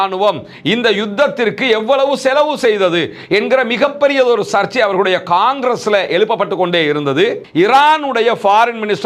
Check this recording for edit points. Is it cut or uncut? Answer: cut